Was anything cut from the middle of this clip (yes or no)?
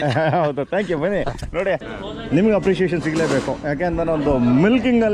yes